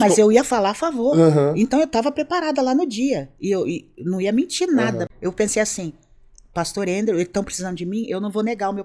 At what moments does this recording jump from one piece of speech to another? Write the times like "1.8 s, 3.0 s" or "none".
5.1 s